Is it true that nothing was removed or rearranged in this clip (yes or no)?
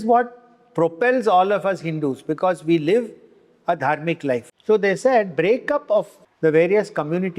no